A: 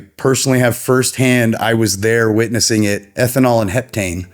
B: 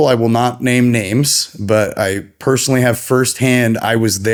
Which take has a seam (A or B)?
A